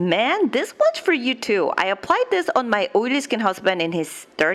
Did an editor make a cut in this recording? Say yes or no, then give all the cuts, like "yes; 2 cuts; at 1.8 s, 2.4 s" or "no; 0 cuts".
no; 0 cuts